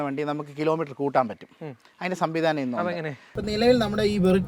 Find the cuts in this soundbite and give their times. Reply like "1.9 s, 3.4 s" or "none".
3.4 s